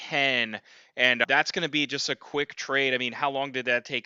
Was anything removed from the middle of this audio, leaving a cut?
no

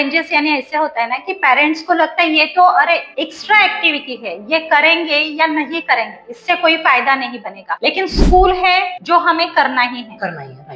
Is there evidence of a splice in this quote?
no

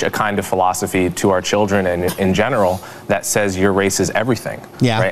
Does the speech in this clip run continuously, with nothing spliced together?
yes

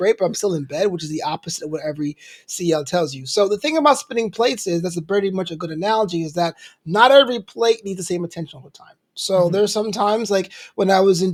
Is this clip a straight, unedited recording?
yes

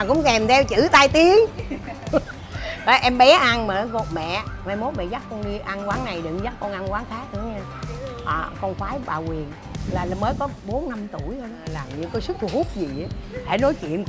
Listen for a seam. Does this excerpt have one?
no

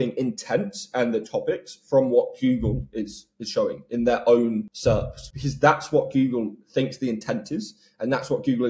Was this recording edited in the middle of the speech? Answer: yes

